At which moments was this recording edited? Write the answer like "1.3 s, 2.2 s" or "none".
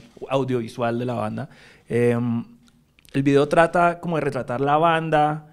none